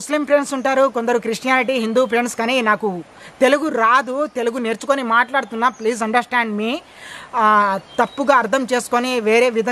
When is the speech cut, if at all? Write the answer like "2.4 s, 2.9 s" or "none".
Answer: none